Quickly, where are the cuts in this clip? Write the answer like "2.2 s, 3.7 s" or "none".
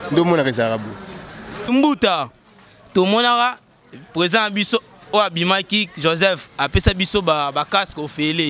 1.7 s